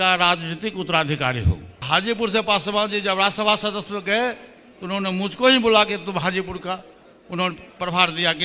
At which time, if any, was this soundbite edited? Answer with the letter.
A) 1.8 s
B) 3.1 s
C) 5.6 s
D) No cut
A